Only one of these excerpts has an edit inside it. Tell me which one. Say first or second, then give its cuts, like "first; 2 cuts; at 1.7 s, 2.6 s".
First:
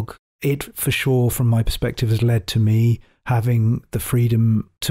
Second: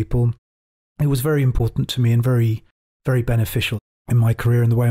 second; 1 cut; at 3.8 s